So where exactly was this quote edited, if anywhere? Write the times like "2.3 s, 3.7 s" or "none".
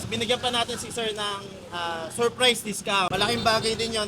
3.1 s